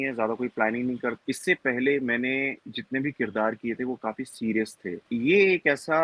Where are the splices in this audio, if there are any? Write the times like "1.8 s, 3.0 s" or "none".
1.2 s, 5.0 s